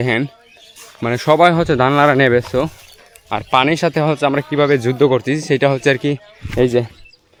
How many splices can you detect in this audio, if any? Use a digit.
0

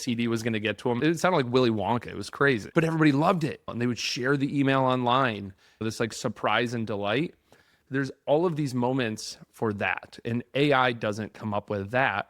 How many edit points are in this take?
4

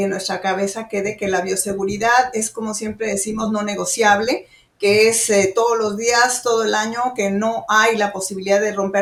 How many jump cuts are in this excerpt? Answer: 0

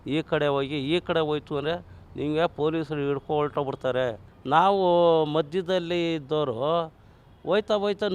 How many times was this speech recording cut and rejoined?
1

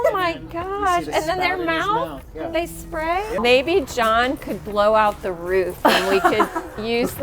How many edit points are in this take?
1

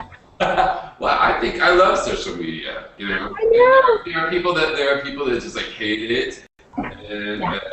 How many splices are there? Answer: 1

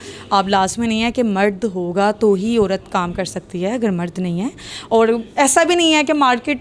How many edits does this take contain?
0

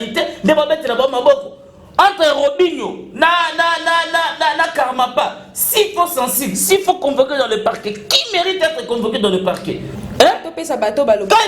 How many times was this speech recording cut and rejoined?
1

